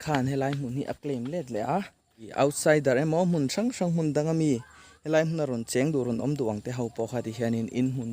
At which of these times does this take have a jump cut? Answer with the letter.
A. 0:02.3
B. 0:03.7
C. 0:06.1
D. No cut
A